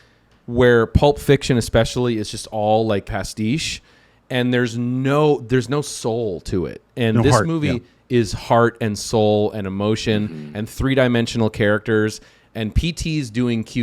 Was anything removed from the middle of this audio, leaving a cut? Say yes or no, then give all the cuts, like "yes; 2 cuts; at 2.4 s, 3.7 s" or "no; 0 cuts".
yes; 1 cut; at 3.1 s